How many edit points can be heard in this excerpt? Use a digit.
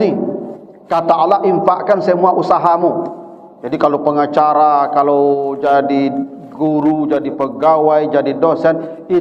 0